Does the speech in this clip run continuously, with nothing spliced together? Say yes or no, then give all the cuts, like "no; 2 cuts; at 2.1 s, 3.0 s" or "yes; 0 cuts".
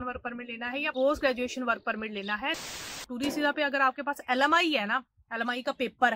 no; 2 cuts; at 0.9 s, 2.6 s